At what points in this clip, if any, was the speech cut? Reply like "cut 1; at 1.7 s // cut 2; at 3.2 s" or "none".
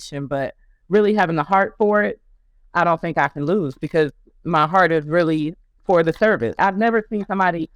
cut 1; at 6.6 s